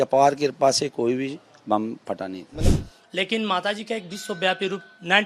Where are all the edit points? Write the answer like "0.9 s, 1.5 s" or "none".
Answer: 2.8 s